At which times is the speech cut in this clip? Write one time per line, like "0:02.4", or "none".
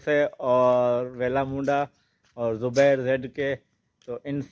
none